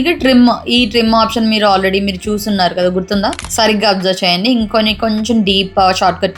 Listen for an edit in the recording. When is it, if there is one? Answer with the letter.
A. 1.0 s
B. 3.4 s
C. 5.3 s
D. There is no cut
B